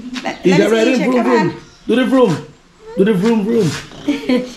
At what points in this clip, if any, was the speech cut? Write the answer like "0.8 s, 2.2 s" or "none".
none